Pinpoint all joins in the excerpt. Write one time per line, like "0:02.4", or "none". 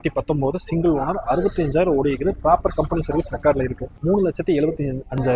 0:03.9